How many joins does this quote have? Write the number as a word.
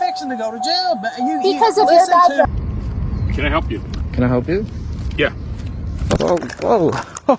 two